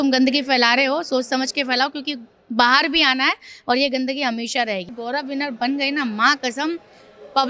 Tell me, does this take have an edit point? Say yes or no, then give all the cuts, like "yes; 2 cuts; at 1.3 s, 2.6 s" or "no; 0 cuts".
yes; 1 cut; at 4.9 s